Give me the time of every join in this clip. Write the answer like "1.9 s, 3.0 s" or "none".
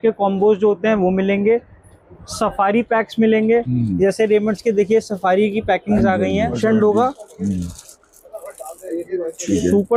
6.6 s